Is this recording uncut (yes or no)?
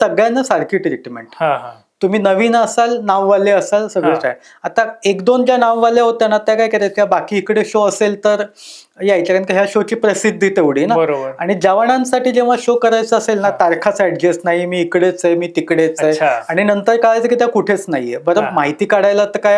yes